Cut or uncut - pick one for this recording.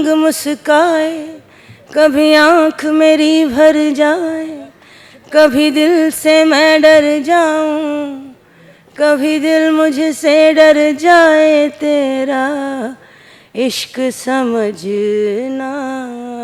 uncut